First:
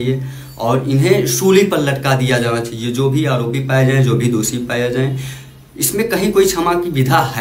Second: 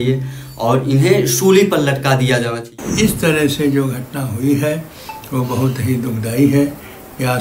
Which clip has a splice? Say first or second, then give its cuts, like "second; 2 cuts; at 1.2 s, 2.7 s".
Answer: second; 1 cut; at 2.8 s